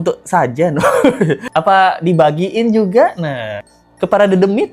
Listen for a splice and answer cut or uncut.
cut